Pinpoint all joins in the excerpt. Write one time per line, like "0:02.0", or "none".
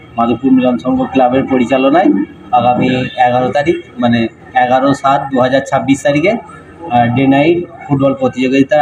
none